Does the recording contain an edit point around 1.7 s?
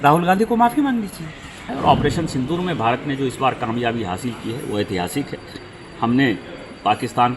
yes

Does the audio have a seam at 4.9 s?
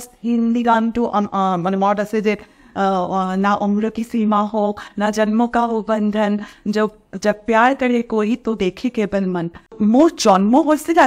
no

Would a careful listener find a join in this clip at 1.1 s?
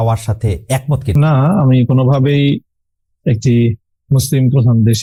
no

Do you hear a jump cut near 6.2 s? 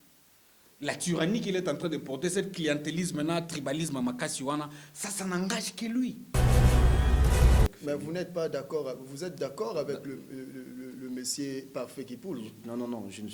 yes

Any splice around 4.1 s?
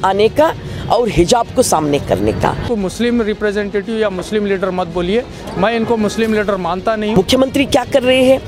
no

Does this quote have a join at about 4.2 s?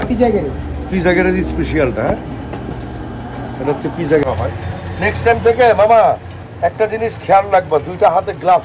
yes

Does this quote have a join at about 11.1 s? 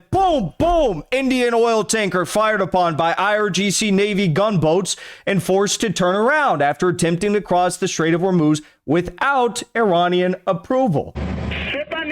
yes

